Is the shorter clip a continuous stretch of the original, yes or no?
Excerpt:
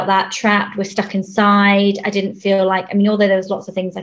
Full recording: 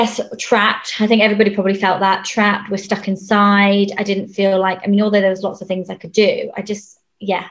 yes